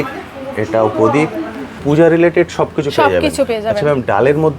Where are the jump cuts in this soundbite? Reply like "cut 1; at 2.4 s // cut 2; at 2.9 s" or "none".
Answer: cut 1; at 1.8 s